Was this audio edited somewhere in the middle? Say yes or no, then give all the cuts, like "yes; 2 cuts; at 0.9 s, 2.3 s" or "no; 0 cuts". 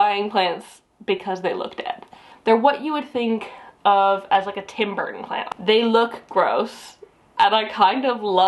yes; 2 cuts; at 2.2 s, 5.3 s